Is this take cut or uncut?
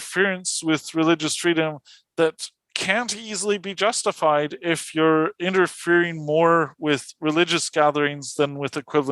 uncut